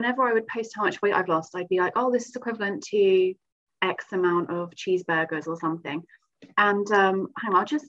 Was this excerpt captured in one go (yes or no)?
yes